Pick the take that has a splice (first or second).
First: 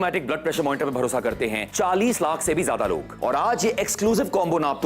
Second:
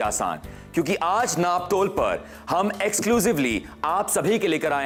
first